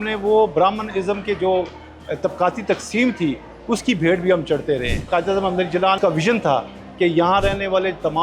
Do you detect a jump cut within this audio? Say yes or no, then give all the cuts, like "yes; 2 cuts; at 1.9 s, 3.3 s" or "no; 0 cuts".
yes; 2 cuts; at 5.0 s, 6.0 s